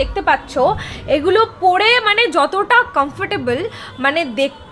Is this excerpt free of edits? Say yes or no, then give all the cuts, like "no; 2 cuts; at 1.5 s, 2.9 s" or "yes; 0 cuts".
yes; 0 cuts